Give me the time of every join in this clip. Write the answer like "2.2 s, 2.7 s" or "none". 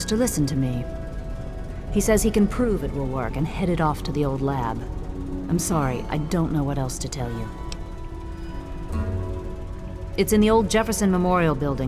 none